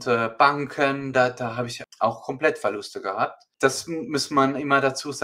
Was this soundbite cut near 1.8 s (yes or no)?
yes